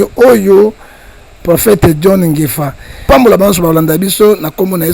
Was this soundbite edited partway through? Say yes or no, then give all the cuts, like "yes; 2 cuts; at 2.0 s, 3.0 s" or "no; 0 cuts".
yes; 1 cut; at 2.9 s